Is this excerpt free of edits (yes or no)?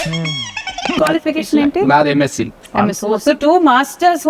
no